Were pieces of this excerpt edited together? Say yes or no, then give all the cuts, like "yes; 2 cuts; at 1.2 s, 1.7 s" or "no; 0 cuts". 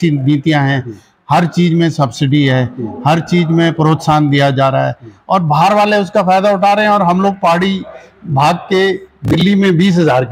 no; 0 cuts